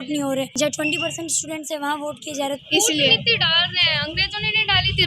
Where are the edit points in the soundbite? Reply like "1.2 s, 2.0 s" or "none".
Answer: 2.6 s